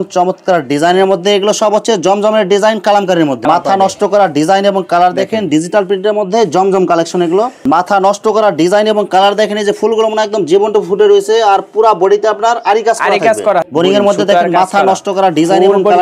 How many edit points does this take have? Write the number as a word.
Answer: three